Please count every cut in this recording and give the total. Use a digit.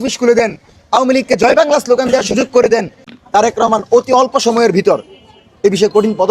1